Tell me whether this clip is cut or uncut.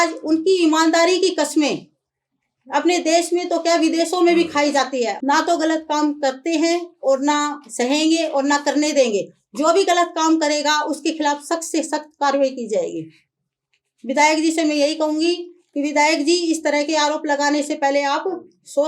cut